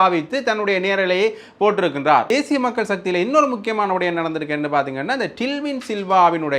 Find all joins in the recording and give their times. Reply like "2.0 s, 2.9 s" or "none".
2.3 s